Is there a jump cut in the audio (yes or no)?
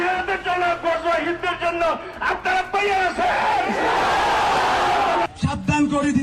yes